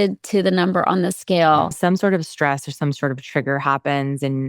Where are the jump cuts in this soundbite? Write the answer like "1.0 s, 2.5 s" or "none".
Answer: 1.7 s